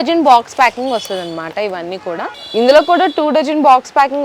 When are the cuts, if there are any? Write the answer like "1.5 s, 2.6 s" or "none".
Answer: 2.4 s